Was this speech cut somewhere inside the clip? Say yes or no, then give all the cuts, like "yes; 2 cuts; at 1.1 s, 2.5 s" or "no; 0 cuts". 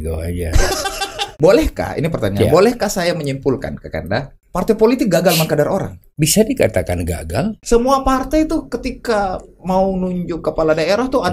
yes; 4 cuts; at 1.3 s, 4.4 s, 6.0 s, 7.6 s